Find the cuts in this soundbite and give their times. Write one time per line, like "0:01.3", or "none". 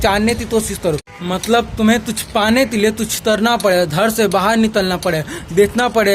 0:01.1